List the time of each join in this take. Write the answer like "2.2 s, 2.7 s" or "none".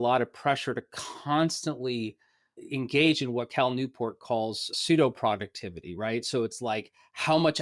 4.7 s